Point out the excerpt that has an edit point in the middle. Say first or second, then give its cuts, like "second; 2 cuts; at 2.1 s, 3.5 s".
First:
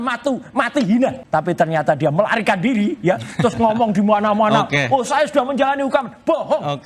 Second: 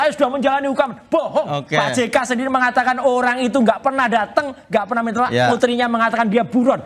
first; 1 cut; at 1.2 s